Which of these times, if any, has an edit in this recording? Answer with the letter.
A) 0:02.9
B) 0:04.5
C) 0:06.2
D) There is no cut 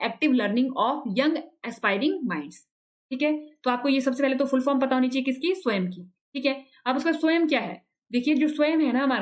D